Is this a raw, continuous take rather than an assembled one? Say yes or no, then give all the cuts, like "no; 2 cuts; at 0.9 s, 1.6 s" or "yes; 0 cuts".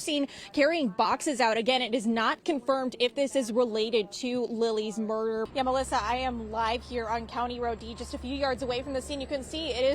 no; 1 cut; at 5.5 s